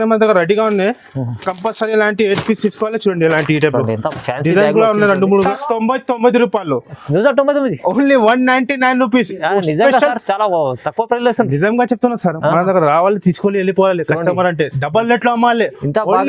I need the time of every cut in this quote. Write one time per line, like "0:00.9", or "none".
0:05.5

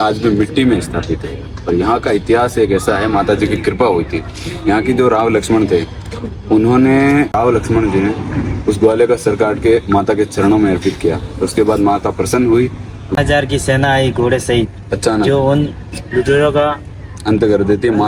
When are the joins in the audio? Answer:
0:07.3
0:13.1

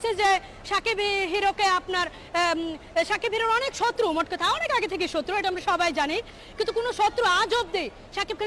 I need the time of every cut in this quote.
none

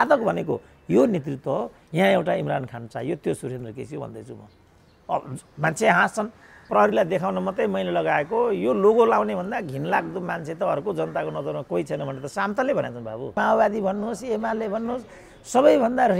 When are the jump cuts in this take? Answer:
0:06.6
0:13.3

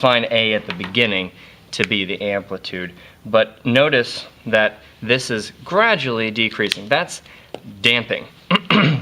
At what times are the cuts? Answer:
0:02.0

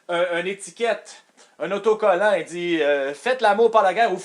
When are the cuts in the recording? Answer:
none

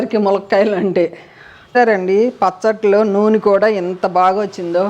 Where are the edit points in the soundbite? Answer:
0:01.7

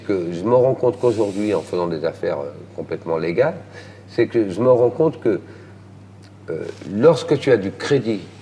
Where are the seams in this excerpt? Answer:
none

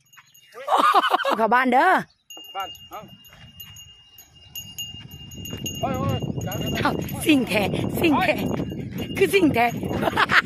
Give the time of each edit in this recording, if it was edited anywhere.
0:01.4

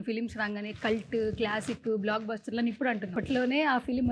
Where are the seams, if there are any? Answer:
0:03.1

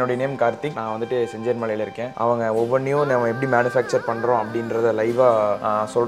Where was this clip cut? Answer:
0:02.1

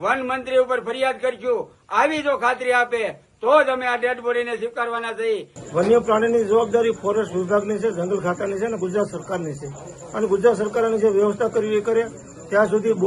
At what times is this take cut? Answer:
0:05.5

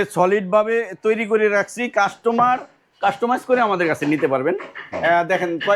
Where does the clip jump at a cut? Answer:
none

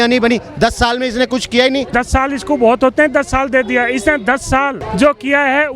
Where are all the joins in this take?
0:01.9
0:04.8

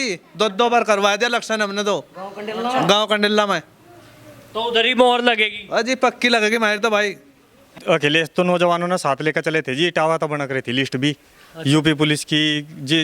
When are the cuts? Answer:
0:07.8

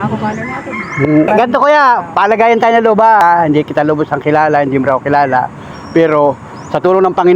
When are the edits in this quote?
0:01.3
0:03.2

